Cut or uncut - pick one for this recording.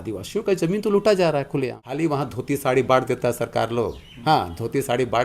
cut